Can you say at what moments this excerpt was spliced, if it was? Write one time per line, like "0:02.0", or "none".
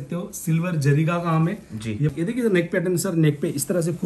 0:02.1